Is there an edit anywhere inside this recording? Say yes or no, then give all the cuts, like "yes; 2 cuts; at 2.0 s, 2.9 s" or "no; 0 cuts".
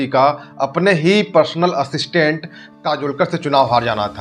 no; 0 cuts